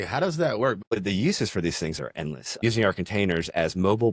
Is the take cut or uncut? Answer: cut